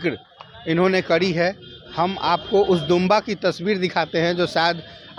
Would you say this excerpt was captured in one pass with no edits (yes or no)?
yes